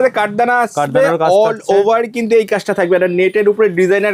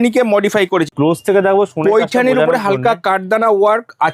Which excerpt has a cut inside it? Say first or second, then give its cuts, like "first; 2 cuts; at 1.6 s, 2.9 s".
second; 1 cut; at 0.9 s